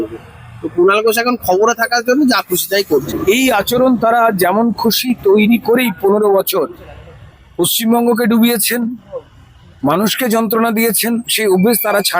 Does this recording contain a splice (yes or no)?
yes